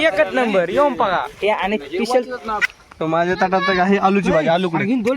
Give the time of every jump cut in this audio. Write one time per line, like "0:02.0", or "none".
0:02.6